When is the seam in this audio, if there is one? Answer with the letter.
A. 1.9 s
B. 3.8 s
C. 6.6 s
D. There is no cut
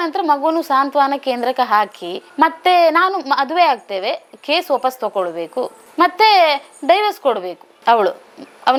D